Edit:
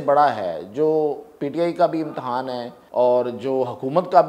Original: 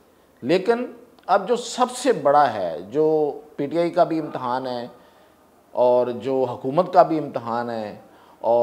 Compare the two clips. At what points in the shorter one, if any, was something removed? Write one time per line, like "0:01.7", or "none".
0:02.7